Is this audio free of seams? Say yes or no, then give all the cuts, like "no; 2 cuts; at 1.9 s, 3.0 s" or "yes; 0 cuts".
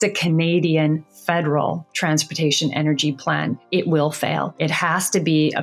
no; 2 cuts; at 3.6 s, 4.5 s